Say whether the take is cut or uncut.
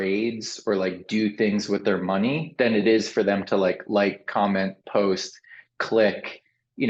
uncut